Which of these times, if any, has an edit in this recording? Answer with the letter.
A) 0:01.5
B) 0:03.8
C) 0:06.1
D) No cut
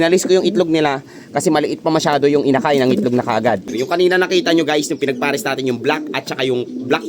B